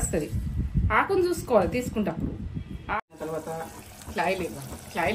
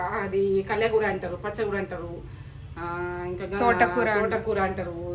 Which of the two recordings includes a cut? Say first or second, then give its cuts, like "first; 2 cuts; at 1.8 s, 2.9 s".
first; 1 cut; at 3.0 s